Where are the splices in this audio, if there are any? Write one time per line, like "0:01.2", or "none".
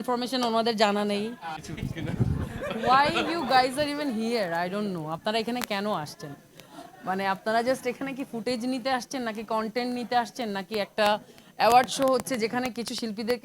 0:01.5